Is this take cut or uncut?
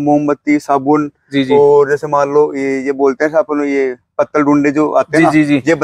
uncut